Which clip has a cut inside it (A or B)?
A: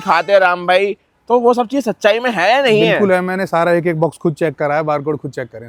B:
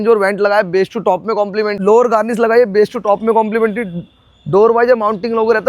B